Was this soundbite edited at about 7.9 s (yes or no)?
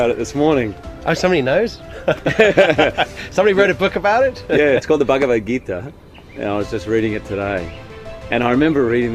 no